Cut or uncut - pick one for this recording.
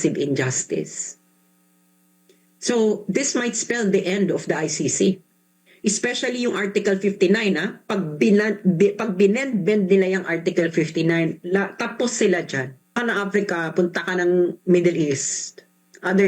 cut